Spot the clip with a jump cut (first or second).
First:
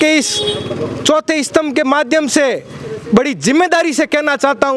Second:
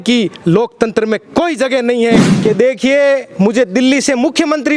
second